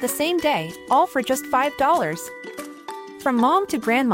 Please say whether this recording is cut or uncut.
uncut